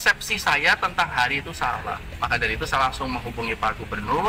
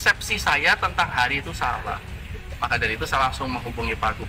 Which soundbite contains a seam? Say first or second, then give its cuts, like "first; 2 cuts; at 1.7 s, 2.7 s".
first; 1 cut; at 2.1 s